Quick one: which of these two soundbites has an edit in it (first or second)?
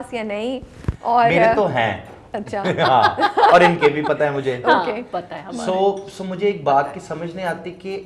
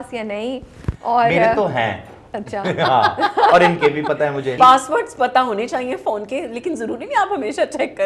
second